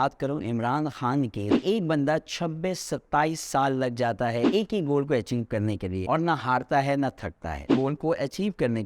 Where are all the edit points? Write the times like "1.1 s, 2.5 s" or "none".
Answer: 1.5 s, 7.7 s